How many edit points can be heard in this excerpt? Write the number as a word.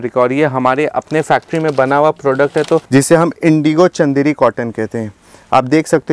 one